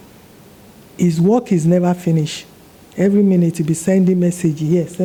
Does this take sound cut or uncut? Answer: uncut